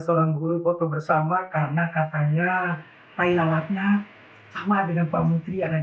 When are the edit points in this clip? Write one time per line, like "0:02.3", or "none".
none